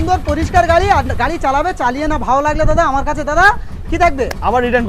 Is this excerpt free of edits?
yes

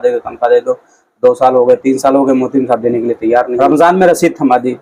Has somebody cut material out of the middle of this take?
yes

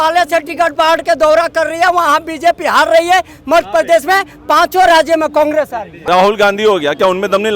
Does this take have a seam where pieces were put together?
yes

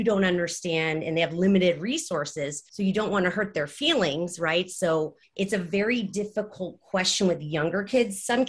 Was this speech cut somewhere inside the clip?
yes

